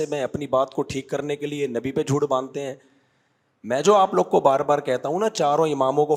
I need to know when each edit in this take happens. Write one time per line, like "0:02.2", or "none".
none